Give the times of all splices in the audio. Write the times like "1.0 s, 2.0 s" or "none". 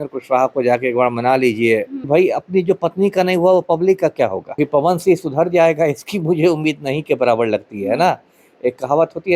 2.1 s, 4.6 s